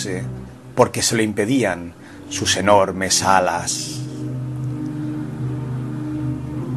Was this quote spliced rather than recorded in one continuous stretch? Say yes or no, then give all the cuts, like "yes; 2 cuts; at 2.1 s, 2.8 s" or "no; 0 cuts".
yes; 1 cut; at 1.4 s